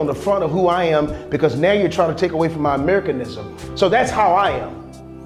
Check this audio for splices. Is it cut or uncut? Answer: uncut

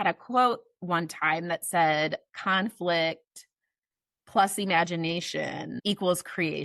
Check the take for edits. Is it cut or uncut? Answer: cut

